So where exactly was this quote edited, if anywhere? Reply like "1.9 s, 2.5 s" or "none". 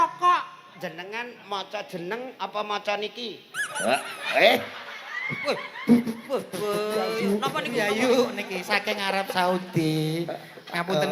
7.2 s